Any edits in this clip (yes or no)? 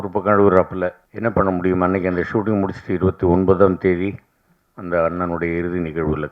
yes